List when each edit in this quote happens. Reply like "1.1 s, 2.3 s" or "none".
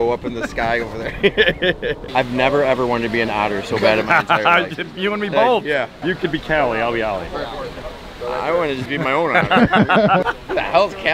1.9 s, 10.2 s